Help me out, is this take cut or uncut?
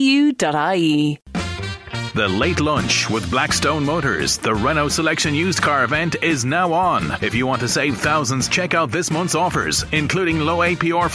cut